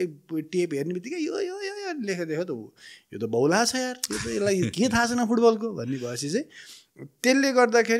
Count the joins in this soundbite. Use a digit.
0